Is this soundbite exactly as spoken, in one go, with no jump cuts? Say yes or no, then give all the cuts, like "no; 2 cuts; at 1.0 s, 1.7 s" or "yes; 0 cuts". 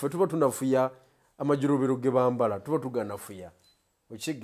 yes; 0 cuts